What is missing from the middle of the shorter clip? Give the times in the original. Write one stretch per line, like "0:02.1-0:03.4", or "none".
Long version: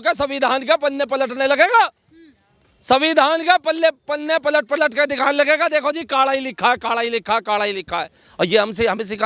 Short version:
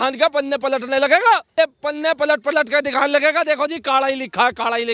0:02.0-0:03.8